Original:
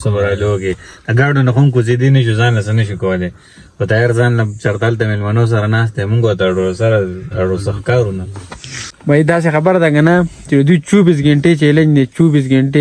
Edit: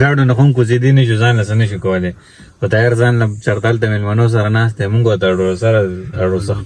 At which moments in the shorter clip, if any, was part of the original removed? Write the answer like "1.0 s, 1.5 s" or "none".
none